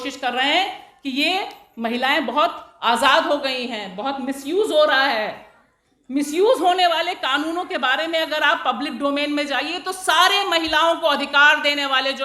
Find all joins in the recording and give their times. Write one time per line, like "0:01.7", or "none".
none